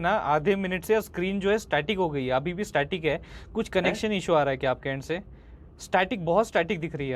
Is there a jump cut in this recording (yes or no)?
no